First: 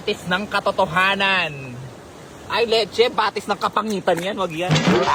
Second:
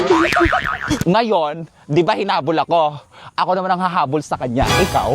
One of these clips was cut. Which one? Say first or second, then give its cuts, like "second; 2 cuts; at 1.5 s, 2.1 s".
second; 1 cut; at 1.0 s